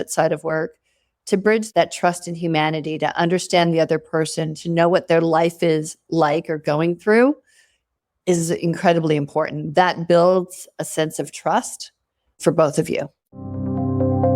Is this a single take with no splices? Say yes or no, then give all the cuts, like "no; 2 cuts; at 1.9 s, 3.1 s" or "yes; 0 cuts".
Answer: no; 2 cuts; at 12.4 s, 13.5 s